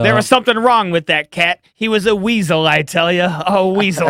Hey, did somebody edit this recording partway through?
no; 0 cuts

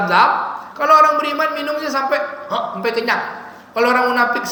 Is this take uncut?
yes; 0 cuts

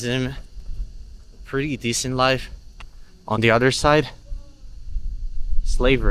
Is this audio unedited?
yes; 0 cuts

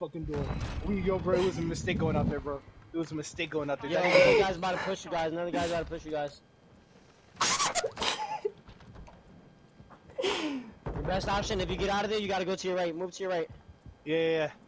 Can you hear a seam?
no; 0 cuts

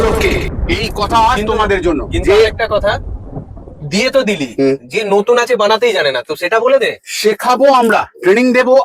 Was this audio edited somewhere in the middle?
no; 0 cuts

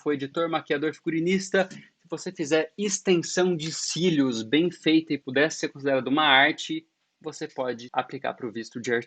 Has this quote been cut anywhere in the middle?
yes; 2 cuts; at 5.2 s, 7.8 s

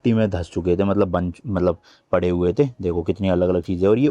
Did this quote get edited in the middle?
no; 0 cuts

